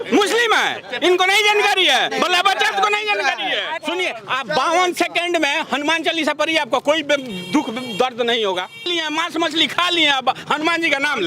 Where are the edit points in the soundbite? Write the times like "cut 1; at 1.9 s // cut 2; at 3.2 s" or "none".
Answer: cut 1; at 3.8 s // cut 2; at 8.9 s